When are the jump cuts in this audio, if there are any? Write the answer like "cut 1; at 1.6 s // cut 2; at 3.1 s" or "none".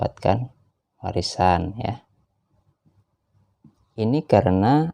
cut 1; at 4.0 s